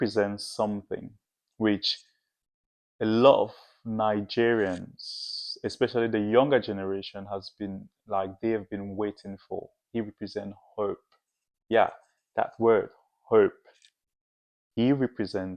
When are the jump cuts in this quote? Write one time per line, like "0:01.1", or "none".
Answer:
none